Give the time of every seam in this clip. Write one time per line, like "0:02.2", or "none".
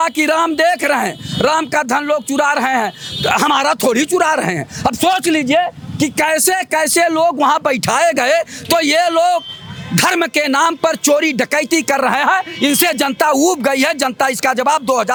none